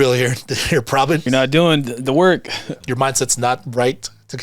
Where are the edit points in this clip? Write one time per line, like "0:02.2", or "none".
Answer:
0:01.3
0:02.8